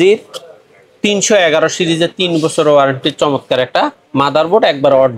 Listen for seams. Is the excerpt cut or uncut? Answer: uncut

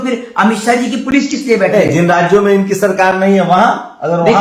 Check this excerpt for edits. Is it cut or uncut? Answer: uncut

